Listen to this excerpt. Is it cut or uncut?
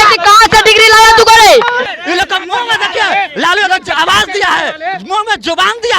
cut